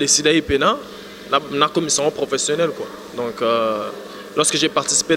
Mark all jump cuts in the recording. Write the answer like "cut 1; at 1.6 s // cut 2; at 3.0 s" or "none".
none